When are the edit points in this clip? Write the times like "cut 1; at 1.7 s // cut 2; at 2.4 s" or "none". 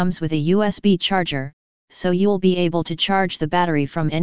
none